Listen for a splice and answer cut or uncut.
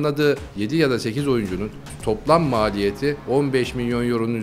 uncut